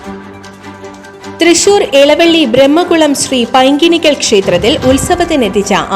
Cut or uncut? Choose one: cut